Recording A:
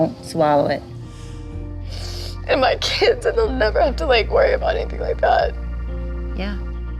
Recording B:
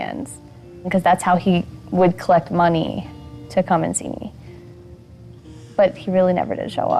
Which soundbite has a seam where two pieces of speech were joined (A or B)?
A